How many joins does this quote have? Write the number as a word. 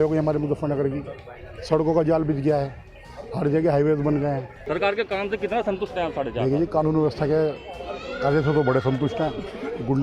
one